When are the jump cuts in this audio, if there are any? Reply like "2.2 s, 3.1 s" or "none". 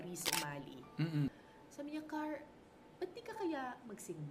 1.3 s